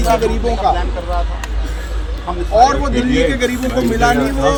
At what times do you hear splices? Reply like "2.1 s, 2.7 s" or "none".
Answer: none